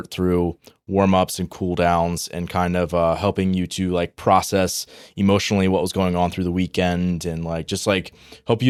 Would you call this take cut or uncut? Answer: uncut